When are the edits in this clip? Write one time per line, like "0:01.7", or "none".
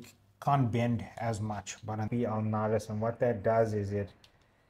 0:02.1